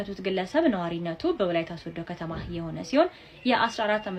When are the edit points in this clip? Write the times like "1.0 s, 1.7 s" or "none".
none